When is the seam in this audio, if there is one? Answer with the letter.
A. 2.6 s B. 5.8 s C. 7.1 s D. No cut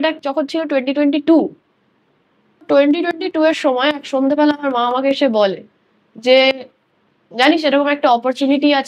A